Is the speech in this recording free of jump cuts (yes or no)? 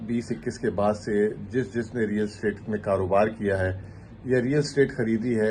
yes